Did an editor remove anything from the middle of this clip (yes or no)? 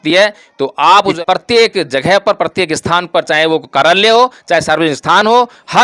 yes